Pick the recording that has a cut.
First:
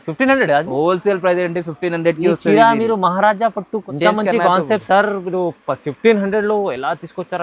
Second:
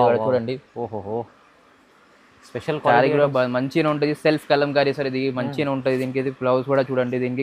first; 1 cut; at 3.9 s

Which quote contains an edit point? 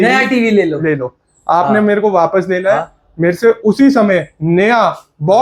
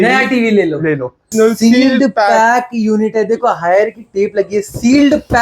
second; 1 cut; at 1.3 s

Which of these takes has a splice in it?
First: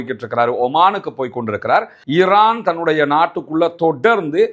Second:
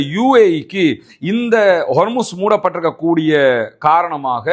first; 1 cut; at 2.0 s

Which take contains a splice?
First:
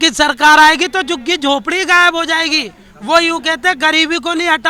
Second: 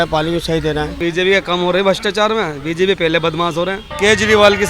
second; 2 cuts; at 0.9 s, 3.8 s

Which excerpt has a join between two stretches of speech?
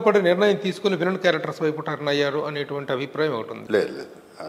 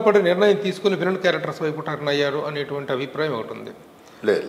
first; 1 cut; at 3.6 s

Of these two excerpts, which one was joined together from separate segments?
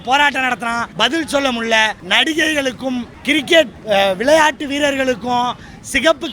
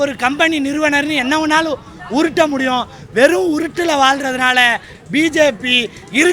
first; 4 cuts; at 0.9 s, 2.0 s, 3.1 s, 3.8 s

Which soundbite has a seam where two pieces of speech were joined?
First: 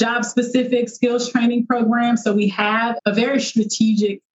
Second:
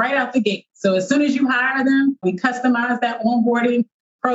first; 1 cut; at 3.0 s

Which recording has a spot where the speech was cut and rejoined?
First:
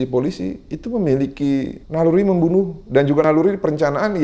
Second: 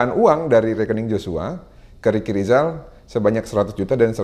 first; 2 cuts; at 1.8 s, 3.2 s

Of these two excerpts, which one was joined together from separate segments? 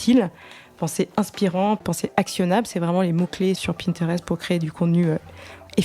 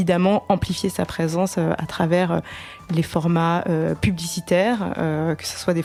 first; 2 cuts; at 1.8 s, 3.6 s

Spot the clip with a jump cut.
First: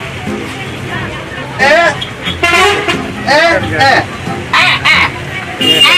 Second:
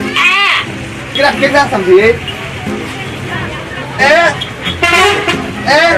second; 1 cut; at 1.1 s

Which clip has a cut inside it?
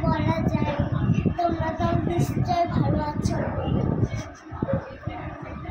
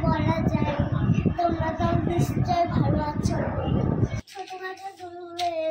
second; 1 cut; at 4.3 s

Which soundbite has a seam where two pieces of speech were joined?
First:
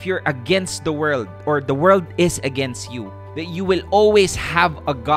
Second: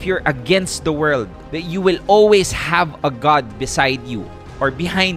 second; 1 cut; at 1.3 s

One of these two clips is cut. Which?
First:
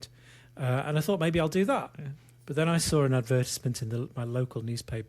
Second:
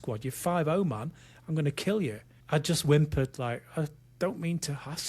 second; 1 cut; at 2.3 s

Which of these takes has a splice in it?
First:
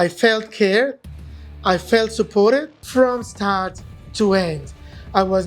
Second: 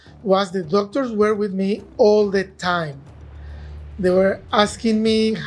first; 1 cut; at 2.8 s

